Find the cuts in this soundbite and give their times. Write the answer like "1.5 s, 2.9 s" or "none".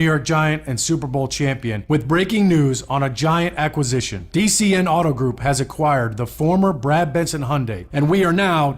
7.8 s